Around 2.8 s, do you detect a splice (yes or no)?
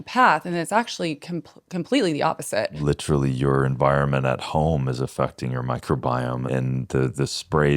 yes